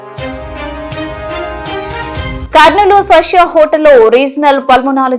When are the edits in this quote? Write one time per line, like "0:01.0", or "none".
0:00.7
0:02.4